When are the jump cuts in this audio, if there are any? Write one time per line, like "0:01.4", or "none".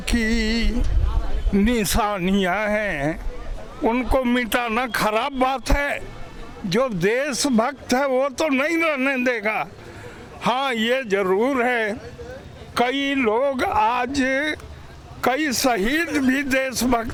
none